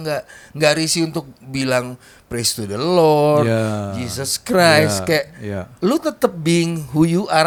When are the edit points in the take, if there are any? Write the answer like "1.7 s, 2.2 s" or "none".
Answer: none